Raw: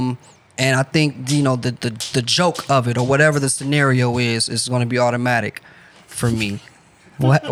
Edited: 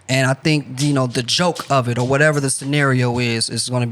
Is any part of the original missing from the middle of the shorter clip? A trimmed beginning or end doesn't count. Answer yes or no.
yes